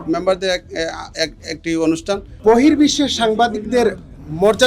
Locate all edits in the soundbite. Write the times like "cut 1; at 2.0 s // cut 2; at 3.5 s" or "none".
cut 1; at 2.3 s